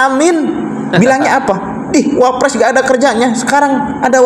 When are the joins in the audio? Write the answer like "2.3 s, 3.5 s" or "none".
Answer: none